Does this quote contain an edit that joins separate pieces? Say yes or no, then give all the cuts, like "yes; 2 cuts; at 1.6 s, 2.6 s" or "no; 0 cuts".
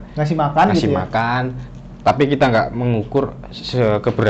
no; 0 cuts